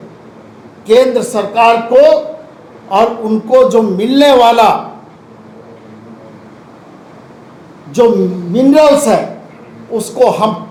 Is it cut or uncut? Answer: uncut